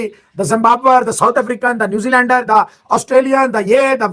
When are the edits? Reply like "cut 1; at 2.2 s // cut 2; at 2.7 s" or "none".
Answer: none